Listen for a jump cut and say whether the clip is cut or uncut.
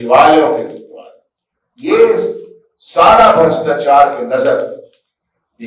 uncut